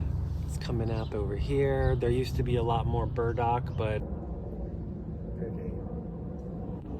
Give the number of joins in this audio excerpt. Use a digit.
1